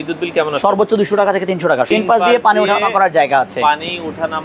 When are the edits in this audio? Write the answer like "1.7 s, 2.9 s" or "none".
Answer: 1.9 s